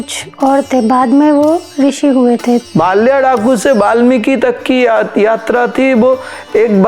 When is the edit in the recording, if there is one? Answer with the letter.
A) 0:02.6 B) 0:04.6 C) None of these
A